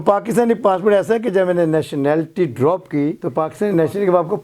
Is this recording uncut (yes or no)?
no